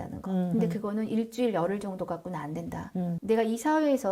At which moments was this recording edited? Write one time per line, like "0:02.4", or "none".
0:03.2